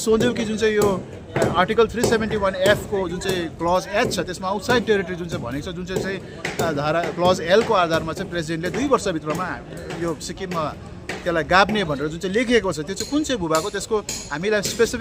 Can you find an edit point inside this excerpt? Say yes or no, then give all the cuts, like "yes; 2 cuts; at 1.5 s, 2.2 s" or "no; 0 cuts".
no; 0 cuts